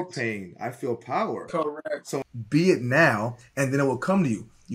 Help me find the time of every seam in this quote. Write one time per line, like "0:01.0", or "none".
0:02.2

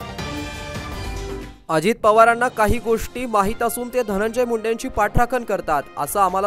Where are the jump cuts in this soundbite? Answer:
0:01.0

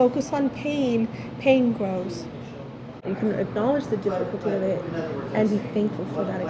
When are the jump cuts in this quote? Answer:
0:03.0

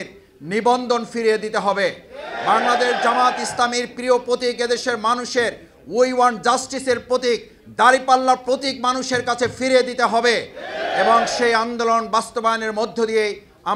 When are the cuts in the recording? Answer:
none

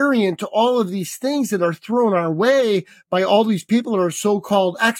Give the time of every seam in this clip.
none

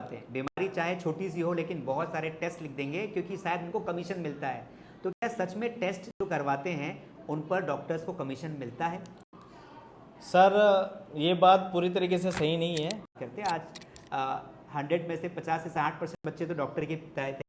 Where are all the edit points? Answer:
0:13.2

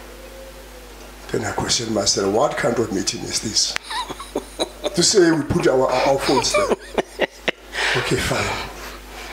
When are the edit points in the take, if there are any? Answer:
none

